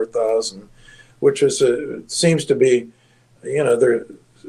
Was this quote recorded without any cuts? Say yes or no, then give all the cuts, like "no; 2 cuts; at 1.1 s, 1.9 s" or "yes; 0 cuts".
yes; 0 cuts